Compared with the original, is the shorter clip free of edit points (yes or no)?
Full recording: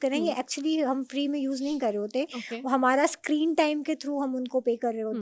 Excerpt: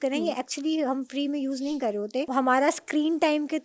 no